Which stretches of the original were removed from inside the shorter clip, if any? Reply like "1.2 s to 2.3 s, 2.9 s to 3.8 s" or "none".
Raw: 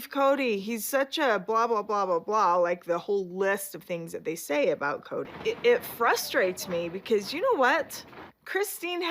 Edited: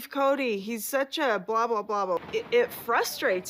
2.2 s to 5.4 s